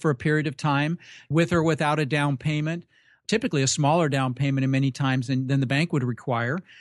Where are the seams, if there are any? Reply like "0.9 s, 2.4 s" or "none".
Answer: 1.3 s, 3.2 s